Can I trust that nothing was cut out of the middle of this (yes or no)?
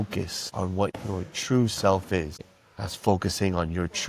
no